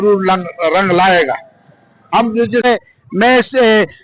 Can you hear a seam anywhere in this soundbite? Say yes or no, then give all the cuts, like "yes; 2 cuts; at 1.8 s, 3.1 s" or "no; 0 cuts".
yes; 1 cut; at 2.6 s